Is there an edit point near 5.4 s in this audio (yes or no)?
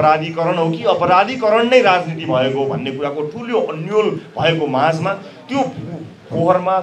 no